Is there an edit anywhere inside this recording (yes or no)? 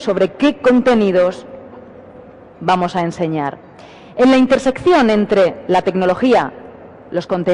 yes